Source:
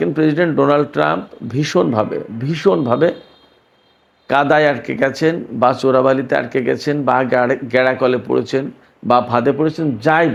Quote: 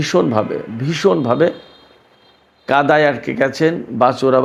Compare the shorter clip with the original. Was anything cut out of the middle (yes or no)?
no